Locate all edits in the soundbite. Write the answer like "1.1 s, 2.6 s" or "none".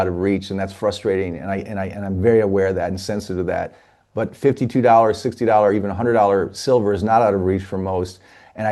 none